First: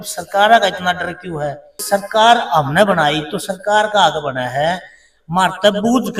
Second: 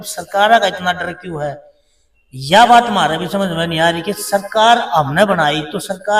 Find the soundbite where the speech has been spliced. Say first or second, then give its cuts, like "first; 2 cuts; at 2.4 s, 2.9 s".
first; 1 cut; at 1.7 s